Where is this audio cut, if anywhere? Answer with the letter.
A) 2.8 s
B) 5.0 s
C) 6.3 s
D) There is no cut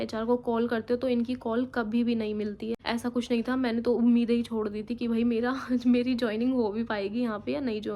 A